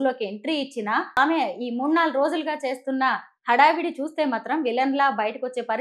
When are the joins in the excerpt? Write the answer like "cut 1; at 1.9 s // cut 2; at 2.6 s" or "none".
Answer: cut 1; at 1.2 s